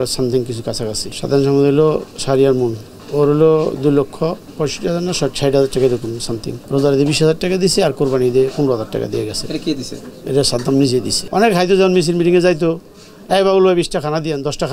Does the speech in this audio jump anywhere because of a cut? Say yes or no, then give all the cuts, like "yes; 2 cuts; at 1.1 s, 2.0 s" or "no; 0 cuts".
yes; 5 cuts; at 1.1 s, 2.9 s, 4.5 s, 6.5 s, 11.2 s